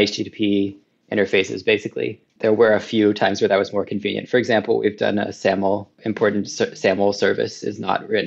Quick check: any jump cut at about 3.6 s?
no; 2 cuts; at 2.2 s, 5.9 s

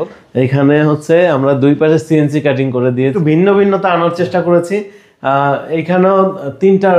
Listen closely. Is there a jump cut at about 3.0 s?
yes; 1 cut; at 3.0 s

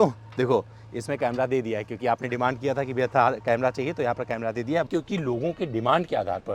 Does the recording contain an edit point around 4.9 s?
yes; 1 cut; at 4.9 s

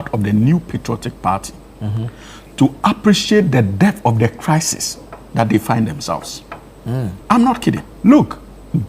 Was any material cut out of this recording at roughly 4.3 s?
no; 2 cuts; at 7.2 s, 7.9 s

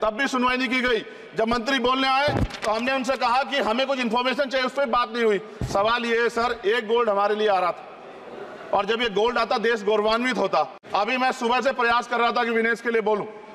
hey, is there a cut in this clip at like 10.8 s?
yes; 1 cut; at 10.8 s

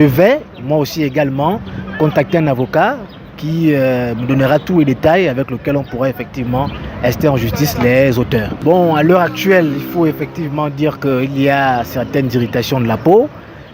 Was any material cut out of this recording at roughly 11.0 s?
no; 1 cut; at 8.5 s

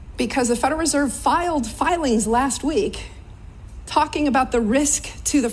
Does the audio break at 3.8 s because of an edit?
no; 0 cuts

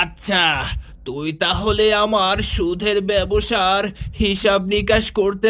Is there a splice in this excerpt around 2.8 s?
no; 0 cuts

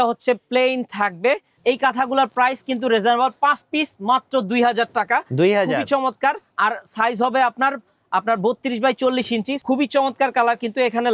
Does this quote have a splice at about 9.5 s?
yes; 2 cuts; at 1.5 s, 9.5 s

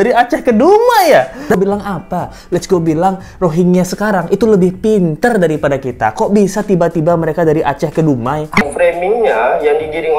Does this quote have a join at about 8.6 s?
yes; 2 cuts; at 1.6 s, 8.6 s

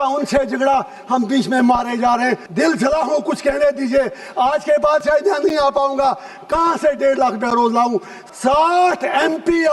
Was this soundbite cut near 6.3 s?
no; 2 cuts; at 2.5 s, 8.2 s

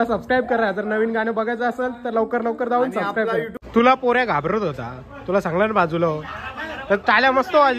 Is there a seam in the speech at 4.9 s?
no; 1 cut; at 3.6 s

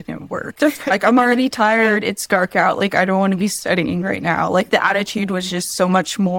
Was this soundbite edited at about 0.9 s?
yes; 1 cut; at 0.9 s

